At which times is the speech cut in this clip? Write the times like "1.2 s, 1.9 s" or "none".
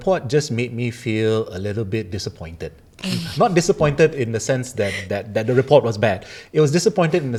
none